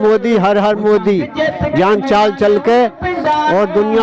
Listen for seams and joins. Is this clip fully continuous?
yes; 0 cuts

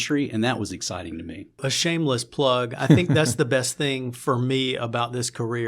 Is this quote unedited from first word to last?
no; 1 cut; at 1.7 s

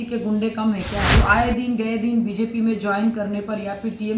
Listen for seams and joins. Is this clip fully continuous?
no; 1 cut; at 1.1 s

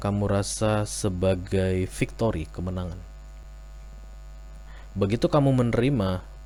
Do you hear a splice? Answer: no; 0 cuts

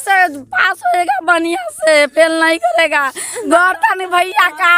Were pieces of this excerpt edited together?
yes; 1 cut; at 3.3 s

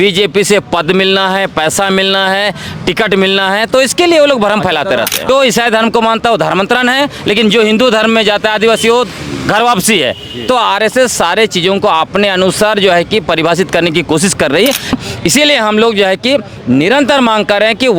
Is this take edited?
yes; 2 cuts; at 5.3 s, 14.9 s

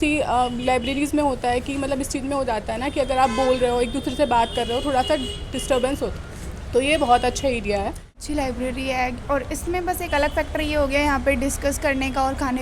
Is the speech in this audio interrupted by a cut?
yes; 1 cut; at 8.1 s

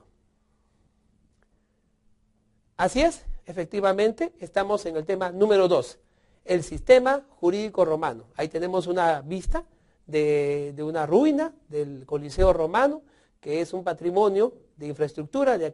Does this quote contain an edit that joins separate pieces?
no; 0 cuts

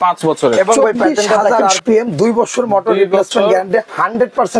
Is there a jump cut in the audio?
yes; 1 cut; at 1.4 s

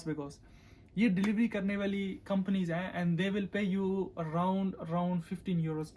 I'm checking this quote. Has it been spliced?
no; 0 cuts

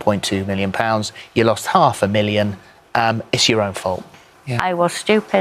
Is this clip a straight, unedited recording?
no; 1 cut; at 4.3 s

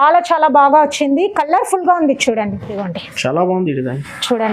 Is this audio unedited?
no; 1 cut; at 2.8 s

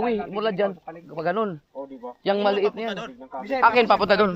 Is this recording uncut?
yes; 0 cuts

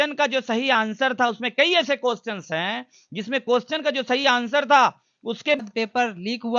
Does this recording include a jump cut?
yes; 1 cut; at 5.6 s

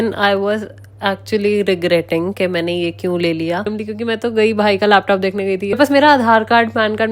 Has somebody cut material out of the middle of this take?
yes; 2 cuts; at 3.7 s, 5.8 s

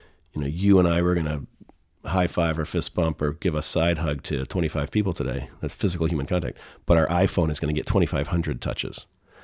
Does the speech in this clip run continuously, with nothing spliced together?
yes; 0 cuts

